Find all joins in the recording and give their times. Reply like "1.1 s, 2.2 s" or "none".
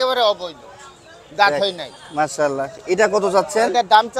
none

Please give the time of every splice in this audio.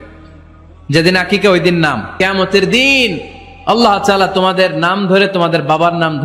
2.1 s

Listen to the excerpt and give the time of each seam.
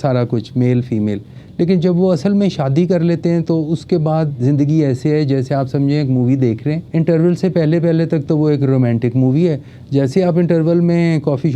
6.8 s

